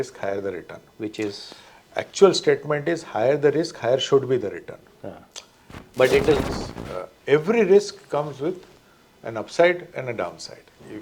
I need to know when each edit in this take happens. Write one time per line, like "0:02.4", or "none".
0:06.4